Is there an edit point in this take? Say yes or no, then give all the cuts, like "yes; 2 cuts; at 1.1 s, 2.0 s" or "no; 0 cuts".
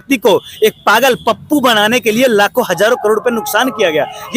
no; 0 cuts